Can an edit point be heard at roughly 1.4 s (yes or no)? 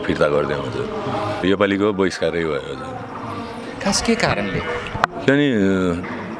yes